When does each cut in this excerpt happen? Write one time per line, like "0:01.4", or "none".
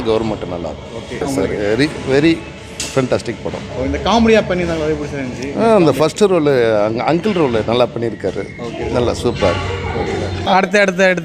0:01.2
0:10.4